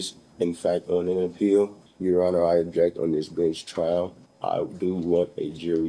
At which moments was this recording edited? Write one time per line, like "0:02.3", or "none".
0:01.9
0:04.2